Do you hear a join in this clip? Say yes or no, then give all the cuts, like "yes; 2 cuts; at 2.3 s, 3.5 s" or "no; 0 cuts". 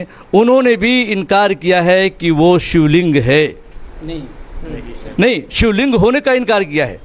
no; 0 cuts